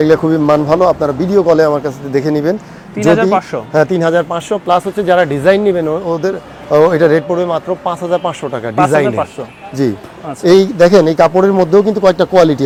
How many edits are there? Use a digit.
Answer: 0